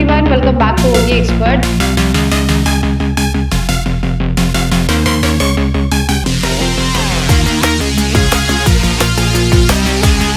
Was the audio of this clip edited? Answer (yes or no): no